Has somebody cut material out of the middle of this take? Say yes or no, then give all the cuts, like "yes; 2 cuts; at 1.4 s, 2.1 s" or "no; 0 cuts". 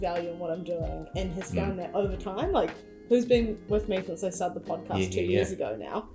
no; 0 cuts